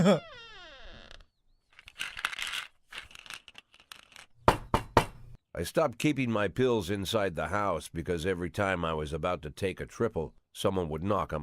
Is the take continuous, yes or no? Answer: no